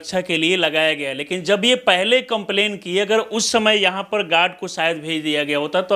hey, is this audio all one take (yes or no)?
yes